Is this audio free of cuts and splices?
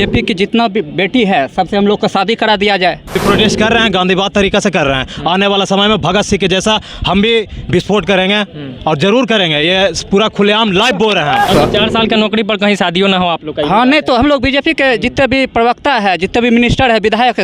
no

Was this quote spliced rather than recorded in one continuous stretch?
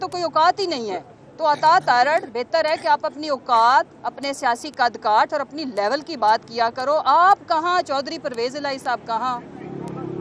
no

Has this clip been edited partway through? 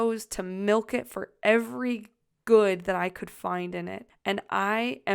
yes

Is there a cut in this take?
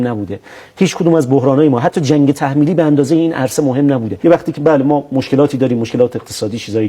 yes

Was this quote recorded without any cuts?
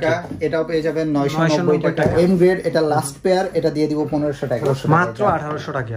no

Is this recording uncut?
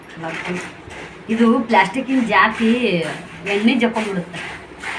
yes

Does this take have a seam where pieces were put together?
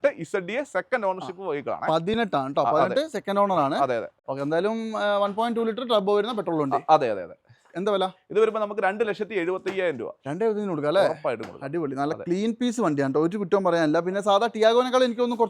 yes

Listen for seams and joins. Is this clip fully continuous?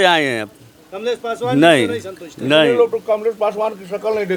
yes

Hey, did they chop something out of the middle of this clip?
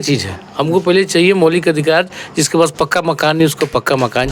no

